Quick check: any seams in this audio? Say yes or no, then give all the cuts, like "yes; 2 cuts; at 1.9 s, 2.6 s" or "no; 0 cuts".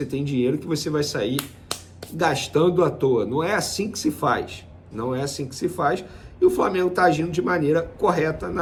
no; 0 cuts